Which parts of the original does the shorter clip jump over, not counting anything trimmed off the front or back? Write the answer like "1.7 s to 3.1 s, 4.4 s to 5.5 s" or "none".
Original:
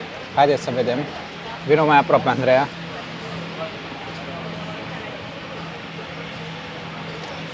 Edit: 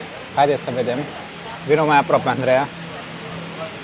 none